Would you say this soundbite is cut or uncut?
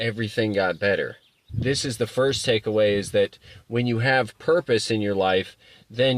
cut